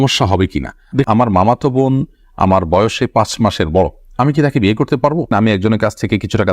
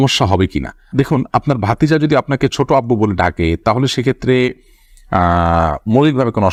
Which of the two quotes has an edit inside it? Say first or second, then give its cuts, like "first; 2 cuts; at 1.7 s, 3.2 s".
first; 2 cuts; at 1.1 s, 5.3 s